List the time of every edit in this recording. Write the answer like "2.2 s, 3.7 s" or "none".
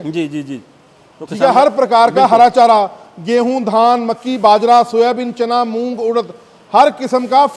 none

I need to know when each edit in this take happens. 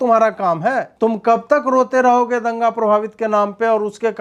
0.9 s

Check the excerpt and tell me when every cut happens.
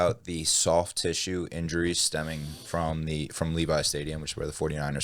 none

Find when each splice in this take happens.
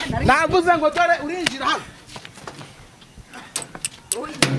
none

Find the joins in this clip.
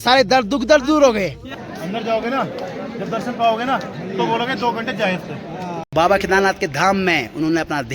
1.5 s, 5.9 s

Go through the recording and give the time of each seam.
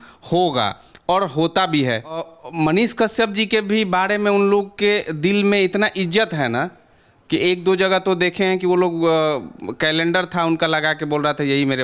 2.4 s

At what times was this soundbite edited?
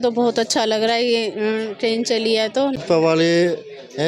2.8 s

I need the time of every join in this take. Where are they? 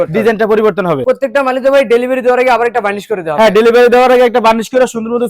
1.0 s

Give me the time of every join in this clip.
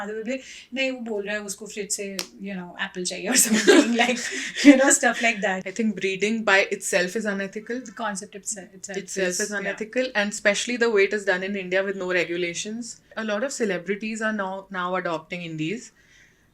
5.5 s, 13.1 s

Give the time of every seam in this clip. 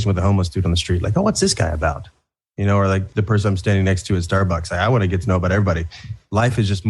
3.1 s

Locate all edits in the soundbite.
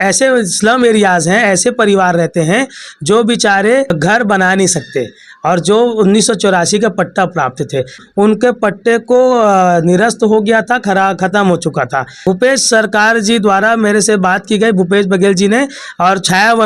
3.9 s, 8.0 s, 12.2 s

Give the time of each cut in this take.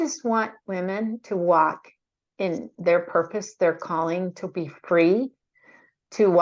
none

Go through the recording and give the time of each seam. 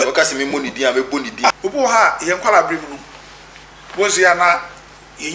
1.5 s

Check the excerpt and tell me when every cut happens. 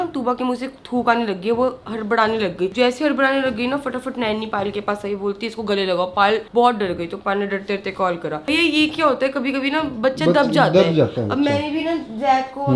none

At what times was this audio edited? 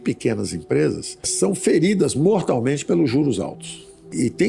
none

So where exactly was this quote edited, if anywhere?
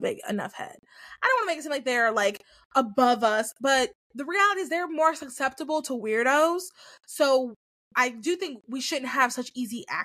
none

